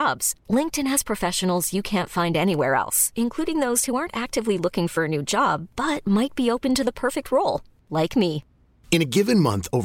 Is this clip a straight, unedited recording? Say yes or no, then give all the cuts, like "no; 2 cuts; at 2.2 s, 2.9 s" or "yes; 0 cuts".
yes; 0 cuts